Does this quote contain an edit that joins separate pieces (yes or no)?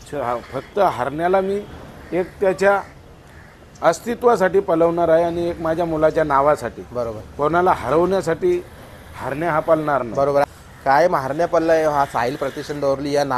yes